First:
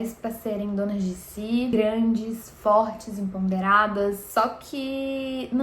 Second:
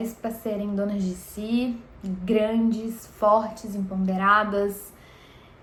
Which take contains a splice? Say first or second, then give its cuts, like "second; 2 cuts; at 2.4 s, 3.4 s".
first; 2 cuts; at 1.7 s, 4.2 s